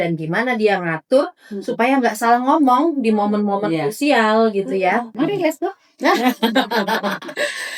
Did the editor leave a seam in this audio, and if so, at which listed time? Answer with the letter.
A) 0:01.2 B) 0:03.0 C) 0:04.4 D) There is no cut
D